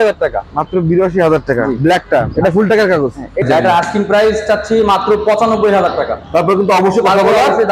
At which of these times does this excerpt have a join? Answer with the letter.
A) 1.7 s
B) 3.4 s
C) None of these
B